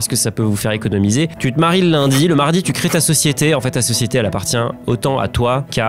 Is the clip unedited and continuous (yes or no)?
no